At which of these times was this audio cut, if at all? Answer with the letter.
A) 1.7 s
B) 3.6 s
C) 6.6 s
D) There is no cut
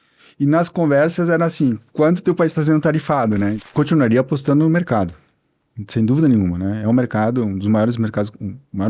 B